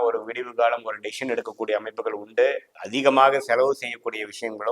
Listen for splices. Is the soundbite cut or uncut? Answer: cut